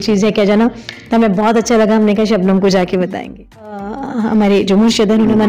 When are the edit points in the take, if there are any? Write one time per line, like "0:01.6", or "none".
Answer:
0:04.0